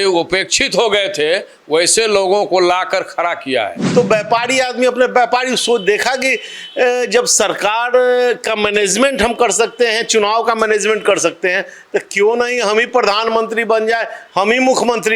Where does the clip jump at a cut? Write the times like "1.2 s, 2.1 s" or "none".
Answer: 3.8 s